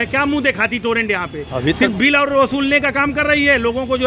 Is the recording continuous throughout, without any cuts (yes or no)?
yes